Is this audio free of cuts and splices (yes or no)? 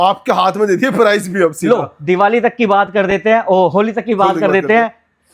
yes